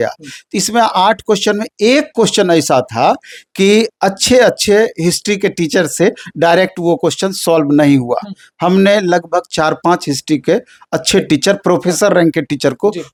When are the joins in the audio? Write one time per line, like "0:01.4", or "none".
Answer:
none